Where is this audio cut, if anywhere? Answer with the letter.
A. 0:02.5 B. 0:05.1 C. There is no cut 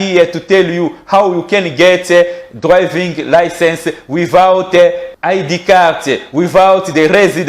B